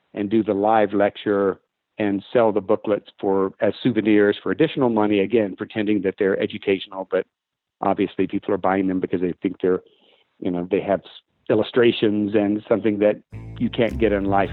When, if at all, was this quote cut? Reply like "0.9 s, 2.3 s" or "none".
none